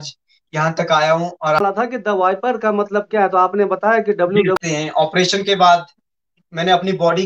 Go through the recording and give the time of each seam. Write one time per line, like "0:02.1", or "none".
0:01.6
0:04.6